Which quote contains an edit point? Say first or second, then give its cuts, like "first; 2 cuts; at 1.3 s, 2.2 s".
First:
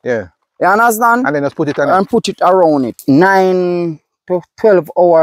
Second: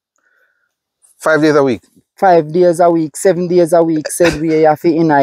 first; 1 cut; at 2.9 s